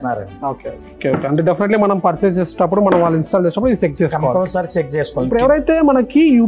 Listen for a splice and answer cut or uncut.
cut